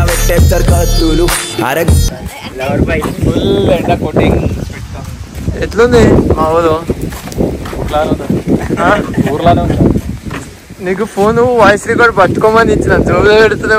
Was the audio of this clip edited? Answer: no; 0 cuts

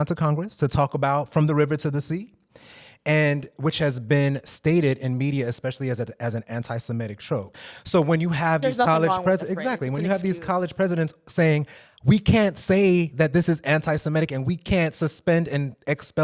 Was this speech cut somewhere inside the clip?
yes; 1 cut; at 7.5 s

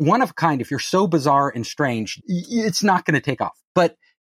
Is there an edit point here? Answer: yes; 1 cut; at 2.1 s

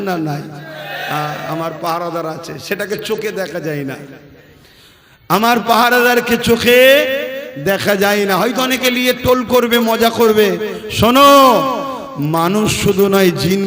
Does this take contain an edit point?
no; 0 cuts

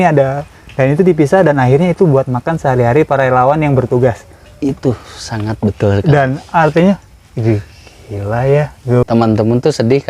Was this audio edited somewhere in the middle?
yes; 1 cut; at 9.0 s

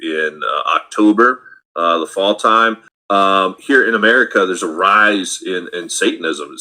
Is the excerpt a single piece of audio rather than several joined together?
no; 1 cut; at 2.9 s

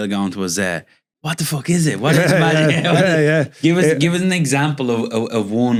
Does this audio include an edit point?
no; 0 cuts

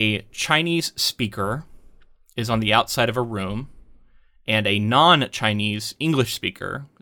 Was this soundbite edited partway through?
no; 0 cuts

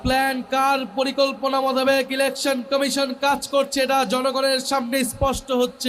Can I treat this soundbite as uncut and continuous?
yes; 0 cuts

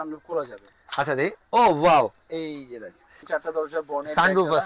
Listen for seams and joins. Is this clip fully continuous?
no; 1 cut; at 3.2 s

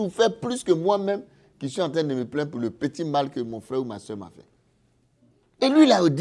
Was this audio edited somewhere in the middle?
no; 0 cuts

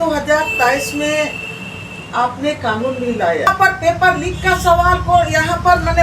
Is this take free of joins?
no; 1 cut; at 3.5 s

